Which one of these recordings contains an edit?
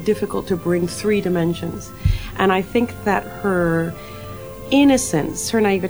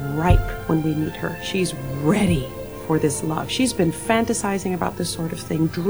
first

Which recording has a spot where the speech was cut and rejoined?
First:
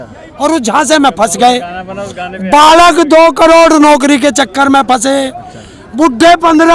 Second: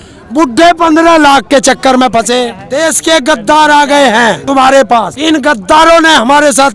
second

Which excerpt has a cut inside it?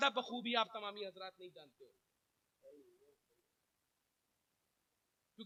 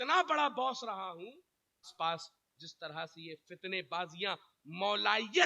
second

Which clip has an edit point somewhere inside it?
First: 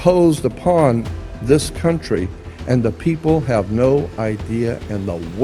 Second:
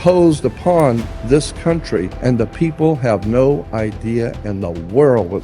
second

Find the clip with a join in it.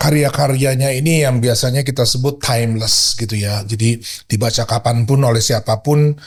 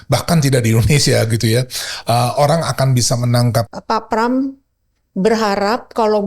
second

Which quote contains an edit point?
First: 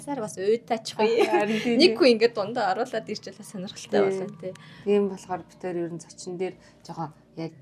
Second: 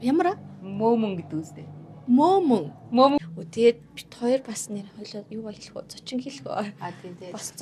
second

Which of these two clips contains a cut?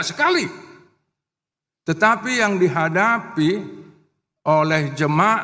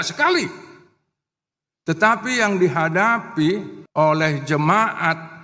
second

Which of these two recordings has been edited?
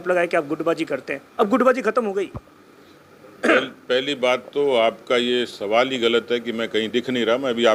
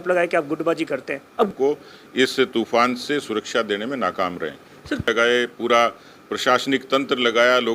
second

